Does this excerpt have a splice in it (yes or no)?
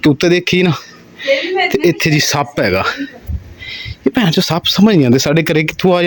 no